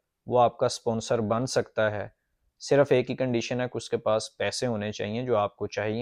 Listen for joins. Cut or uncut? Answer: uncut